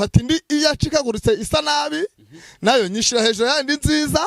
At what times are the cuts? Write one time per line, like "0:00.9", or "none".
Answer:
none